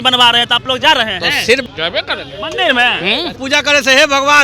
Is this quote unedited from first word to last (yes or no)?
no